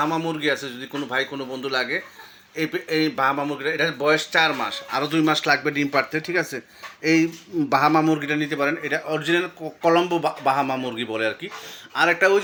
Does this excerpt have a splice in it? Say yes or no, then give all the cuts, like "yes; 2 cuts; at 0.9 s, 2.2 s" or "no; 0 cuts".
no; 0 cuts